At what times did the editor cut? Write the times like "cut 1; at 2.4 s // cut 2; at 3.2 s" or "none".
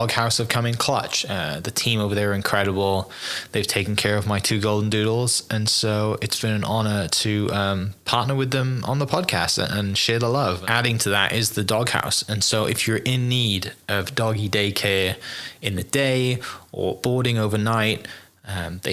cut 1; at 10.6 s